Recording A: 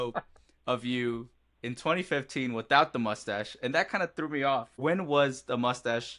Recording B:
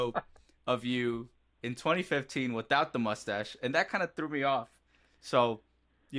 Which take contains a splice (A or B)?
A